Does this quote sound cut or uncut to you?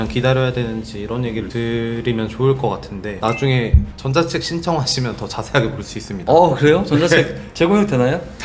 cut